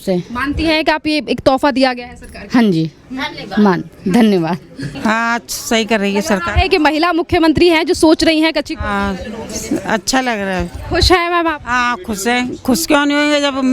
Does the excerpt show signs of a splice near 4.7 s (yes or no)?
yes